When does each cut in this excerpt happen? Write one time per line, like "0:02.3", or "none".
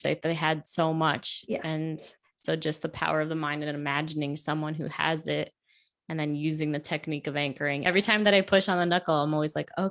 0:07.8